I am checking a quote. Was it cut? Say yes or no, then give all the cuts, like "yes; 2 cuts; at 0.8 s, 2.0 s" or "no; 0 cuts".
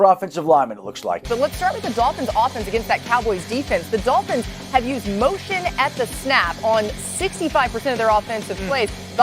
yes; 1 cut; at 1.2 s